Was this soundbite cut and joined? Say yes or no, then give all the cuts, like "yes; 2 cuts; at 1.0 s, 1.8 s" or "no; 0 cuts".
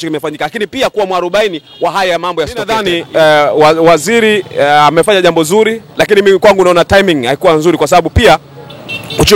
yes; 1 cut; at 2.8 s